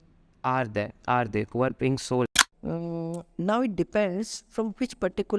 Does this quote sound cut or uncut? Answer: cut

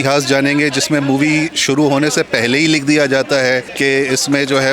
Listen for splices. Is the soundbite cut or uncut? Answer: cut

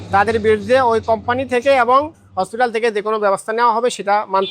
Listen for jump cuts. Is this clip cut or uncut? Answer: uncut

